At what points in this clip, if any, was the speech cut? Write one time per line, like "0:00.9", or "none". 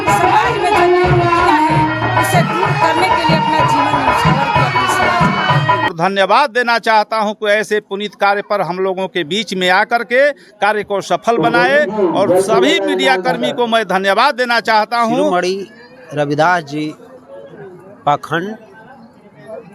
0:05.9
0:15.3